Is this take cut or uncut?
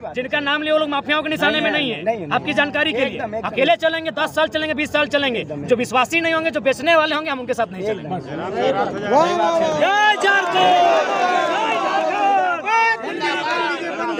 uncut